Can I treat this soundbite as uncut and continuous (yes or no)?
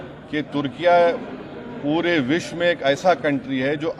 yes